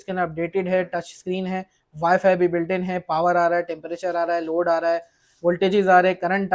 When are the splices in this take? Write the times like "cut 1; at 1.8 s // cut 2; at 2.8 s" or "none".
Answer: none